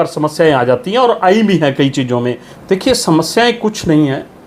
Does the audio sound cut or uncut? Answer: cut